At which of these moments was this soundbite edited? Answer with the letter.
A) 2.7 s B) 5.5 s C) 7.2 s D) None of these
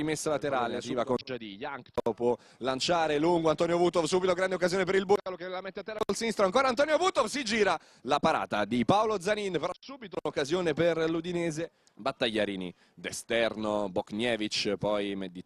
C